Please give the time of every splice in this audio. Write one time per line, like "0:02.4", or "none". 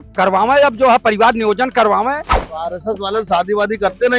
0:02.3

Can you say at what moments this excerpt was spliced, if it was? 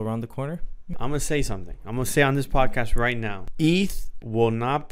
0:00.9
0:03.4

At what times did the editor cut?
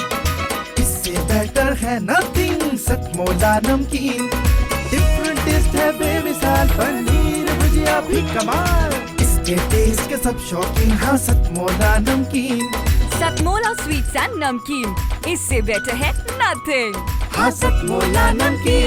none

